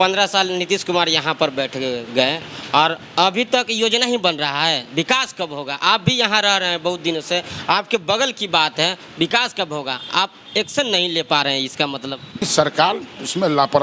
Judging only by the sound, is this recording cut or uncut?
cut